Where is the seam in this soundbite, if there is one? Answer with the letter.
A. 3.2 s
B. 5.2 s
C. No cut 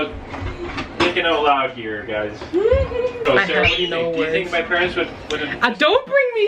A